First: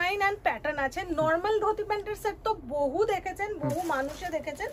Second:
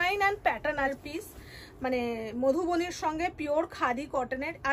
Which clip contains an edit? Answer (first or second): second